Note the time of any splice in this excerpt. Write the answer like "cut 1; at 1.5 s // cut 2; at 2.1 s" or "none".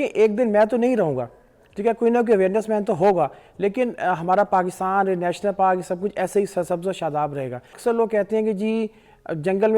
cut 1; at 7.7 s